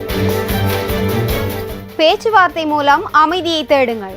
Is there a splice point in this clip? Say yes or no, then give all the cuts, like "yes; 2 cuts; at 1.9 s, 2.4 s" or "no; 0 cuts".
yes; 1 cut; at 1.7 s